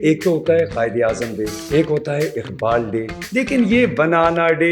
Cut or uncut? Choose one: cut